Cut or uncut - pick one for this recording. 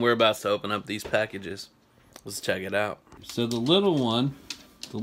cut